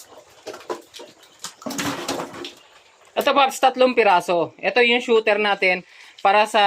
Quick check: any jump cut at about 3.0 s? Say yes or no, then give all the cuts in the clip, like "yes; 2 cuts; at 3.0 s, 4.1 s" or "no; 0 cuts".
yes; 1 cut; at 3.0 s